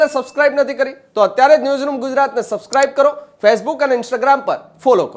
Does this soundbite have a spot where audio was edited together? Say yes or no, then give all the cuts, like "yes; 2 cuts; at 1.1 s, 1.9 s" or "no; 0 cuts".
no; 0 cuts